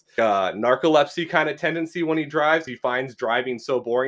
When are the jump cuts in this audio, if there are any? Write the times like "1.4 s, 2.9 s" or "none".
2.7 s